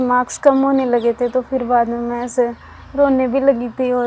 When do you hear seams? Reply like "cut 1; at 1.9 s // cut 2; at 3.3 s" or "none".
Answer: none